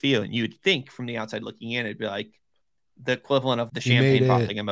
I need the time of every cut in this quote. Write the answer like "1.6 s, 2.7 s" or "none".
3.7 s

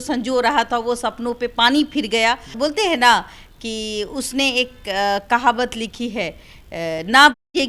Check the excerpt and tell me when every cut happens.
none

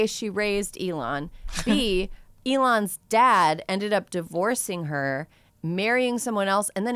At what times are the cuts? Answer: none

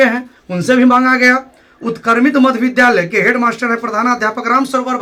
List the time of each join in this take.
none

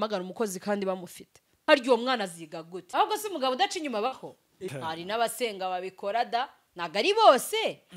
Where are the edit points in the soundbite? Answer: 1.5 s, 2.8 s, 4.6 s

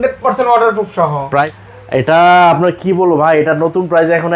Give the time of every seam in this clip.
1.5 s

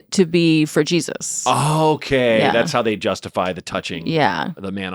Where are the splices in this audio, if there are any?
none

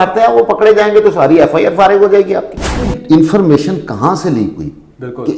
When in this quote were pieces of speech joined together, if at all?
2.9 s

